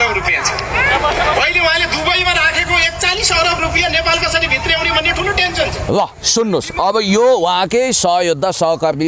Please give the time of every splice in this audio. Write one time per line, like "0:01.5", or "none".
none